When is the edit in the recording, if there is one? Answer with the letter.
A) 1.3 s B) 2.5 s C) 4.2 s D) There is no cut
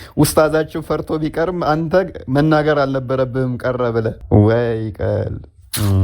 C